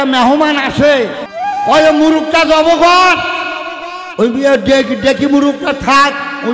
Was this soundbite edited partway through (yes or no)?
yes